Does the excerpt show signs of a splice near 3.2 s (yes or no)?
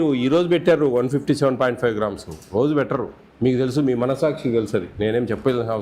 yes